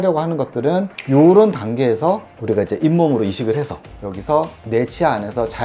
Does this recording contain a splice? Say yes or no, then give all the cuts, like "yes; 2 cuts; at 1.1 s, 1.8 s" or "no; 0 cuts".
no; 0 cuts